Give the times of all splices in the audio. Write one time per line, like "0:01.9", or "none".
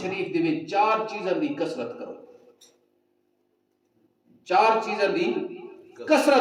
none